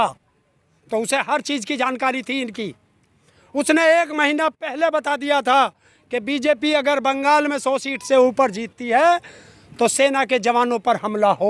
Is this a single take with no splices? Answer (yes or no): yes